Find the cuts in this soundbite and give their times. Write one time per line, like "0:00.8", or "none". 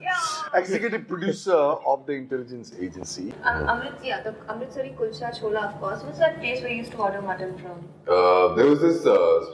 0:03.3